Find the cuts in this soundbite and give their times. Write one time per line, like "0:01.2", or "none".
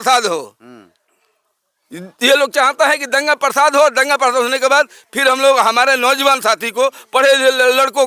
none